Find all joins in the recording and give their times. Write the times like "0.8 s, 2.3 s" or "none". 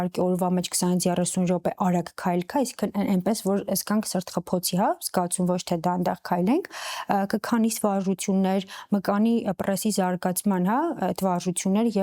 none